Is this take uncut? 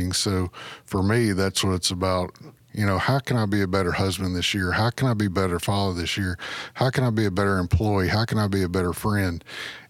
yes; 0 cuts

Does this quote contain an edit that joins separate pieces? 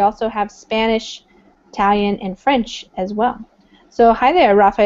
yes; 1 cut; at 2.4 s

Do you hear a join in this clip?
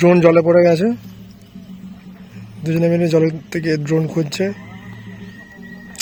no; 0 cuts

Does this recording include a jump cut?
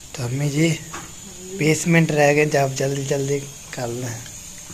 no; 0 cuts

